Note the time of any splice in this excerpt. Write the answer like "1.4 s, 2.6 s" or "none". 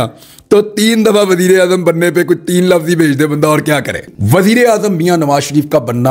4.0 s